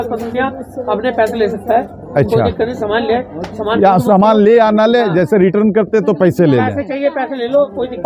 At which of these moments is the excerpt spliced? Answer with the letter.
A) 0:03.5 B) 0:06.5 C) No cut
C